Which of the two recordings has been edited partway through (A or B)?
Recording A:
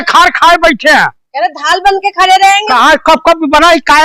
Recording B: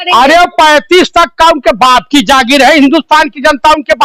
A